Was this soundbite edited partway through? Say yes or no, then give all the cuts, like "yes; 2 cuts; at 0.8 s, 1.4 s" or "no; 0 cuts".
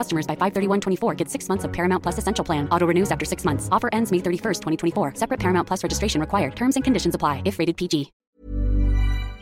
yes; 1 cut; at 8.4 s